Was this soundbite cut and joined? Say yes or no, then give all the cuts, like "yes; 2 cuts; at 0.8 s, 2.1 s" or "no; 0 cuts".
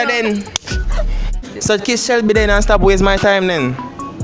yes; 1 cut; at 1.4 s